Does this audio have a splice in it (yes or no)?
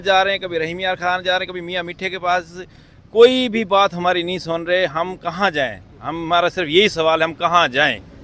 no